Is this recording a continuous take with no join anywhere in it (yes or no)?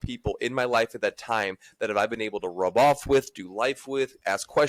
yes